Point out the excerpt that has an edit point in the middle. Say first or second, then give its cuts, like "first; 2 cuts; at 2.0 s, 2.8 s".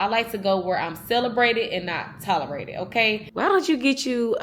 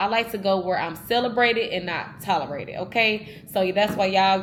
first; 1 cut; at 3.2 s